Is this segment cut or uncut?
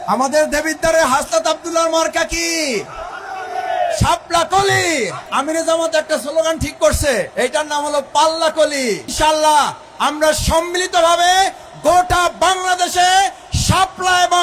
cut